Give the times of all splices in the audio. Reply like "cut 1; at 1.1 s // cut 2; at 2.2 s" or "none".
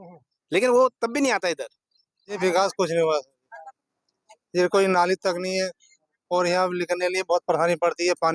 cut 1; at 2.4 s